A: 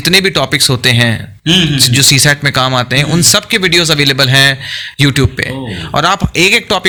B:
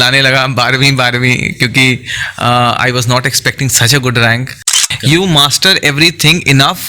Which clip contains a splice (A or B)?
B